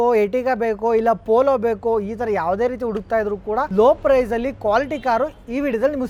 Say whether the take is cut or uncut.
uncut